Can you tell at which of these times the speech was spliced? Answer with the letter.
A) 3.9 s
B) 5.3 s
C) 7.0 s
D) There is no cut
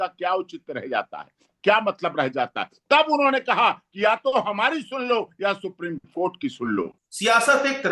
C